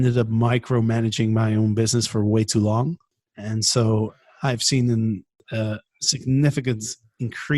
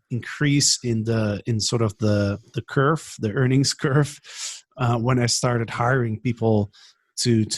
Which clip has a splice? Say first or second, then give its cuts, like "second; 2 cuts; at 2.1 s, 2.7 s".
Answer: first; 2 cuts; at 3.1 s, 5.4 s